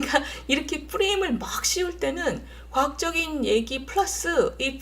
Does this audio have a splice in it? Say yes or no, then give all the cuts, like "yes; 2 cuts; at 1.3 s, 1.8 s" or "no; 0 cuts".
no; 0 cuts